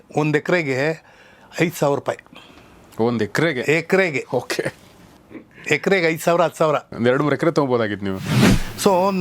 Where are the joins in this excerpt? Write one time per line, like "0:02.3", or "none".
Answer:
0:08.3